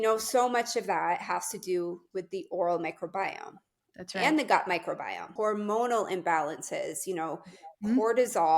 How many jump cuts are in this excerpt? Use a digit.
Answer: 1